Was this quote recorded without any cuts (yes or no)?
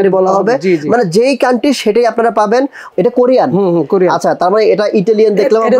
no